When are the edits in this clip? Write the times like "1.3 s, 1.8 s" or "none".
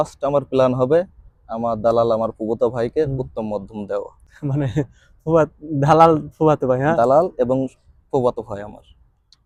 none